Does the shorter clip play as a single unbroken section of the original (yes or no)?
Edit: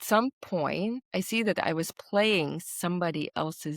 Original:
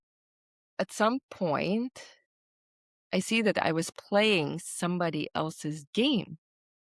no